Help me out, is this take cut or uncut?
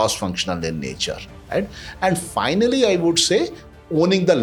uncut